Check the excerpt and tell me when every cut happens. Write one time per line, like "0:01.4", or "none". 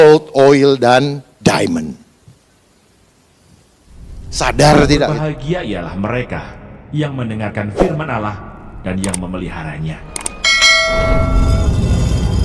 0:05.2